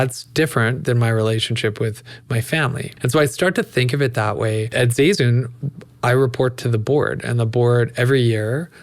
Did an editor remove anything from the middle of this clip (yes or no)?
yes